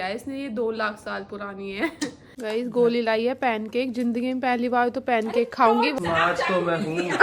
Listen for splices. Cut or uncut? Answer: cut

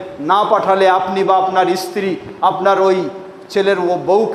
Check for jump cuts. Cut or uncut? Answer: uncut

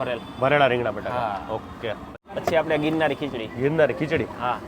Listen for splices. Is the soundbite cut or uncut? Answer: cut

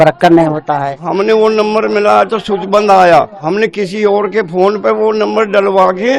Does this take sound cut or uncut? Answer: cut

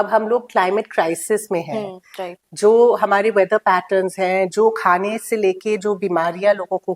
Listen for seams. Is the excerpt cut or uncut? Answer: uncut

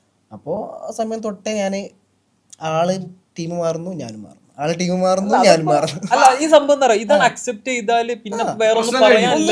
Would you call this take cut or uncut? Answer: uncut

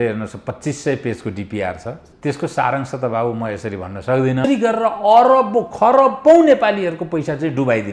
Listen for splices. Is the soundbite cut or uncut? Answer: cut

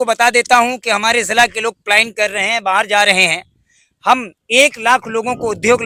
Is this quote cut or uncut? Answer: uncut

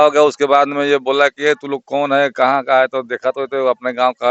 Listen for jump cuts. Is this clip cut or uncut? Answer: uncut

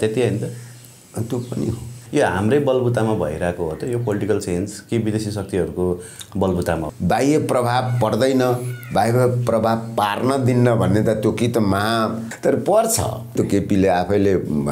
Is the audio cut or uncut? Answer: cut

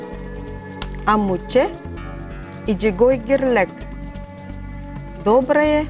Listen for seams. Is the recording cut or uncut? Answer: cut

